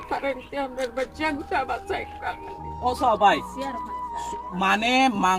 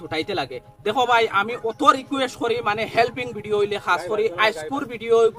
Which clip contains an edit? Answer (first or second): first